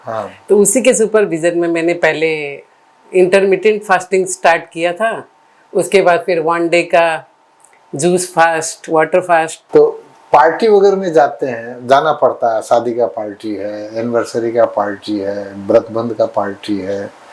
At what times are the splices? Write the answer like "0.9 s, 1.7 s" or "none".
9.6 s